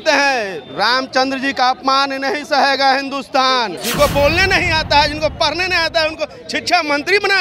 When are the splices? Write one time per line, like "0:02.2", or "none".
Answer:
0:03.8